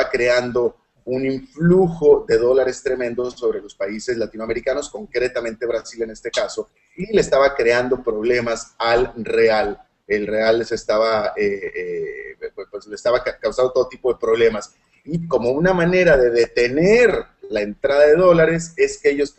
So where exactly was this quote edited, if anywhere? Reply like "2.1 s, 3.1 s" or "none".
10.8 s